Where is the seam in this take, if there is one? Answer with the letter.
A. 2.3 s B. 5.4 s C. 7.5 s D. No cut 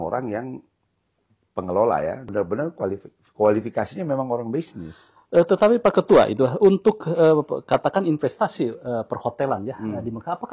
A